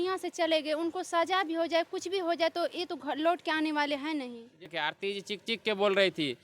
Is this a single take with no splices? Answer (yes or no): no